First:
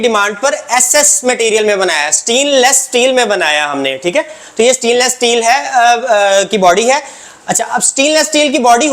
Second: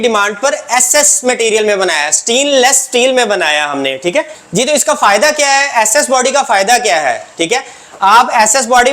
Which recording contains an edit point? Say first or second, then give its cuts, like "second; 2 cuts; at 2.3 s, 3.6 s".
second; 1 cut; at 4.4 s